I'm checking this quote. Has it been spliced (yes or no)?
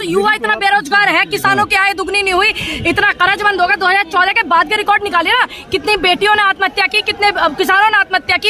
no